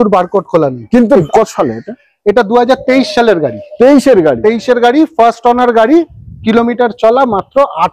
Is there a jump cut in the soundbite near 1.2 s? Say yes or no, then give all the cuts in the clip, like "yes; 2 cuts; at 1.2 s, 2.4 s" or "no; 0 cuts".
yes; 1 cut; at 1.2 s